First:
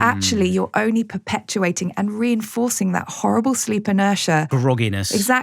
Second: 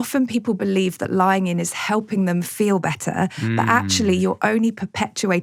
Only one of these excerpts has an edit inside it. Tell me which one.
first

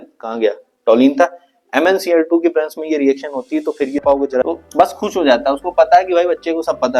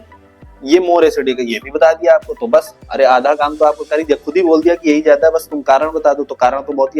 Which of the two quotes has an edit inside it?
first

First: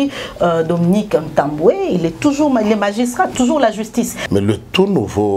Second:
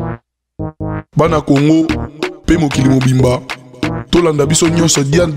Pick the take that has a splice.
first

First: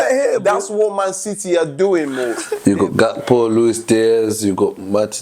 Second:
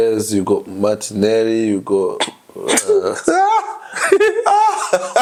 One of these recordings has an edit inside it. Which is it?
first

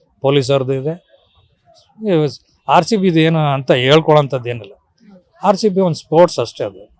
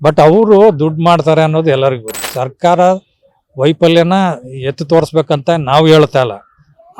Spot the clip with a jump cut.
second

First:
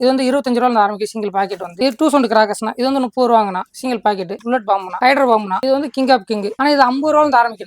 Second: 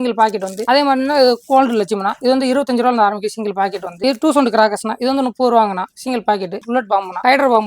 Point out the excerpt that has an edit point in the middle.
first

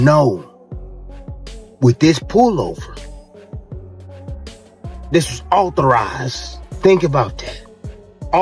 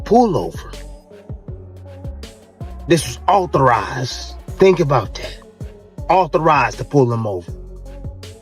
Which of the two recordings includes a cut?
second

